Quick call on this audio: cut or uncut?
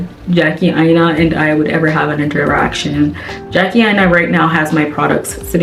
uncut